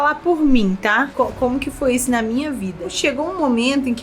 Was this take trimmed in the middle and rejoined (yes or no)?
yes